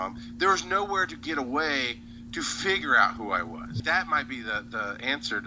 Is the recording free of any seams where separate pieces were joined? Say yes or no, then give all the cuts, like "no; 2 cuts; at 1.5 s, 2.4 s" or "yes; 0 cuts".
no; 1 cut; at 3.8 s